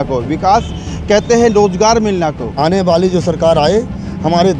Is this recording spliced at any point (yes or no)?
yes